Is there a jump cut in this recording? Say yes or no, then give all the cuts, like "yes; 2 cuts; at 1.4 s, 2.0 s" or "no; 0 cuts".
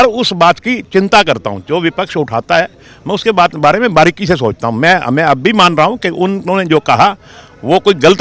no; 0 cuts